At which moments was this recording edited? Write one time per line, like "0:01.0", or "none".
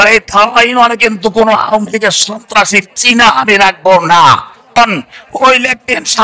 0:04.8